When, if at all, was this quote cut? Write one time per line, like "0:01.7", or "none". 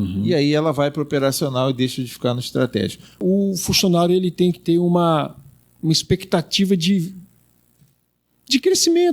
0:03.2